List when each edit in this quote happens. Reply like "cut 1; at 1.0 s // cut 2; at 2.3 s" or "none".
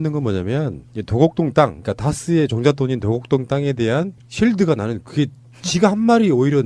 cut 1; at 4.9 s